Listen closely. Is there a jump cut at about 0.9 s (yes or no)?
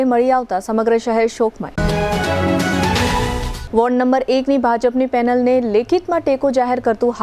no